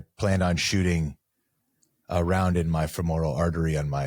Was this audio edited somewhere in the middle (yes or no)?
no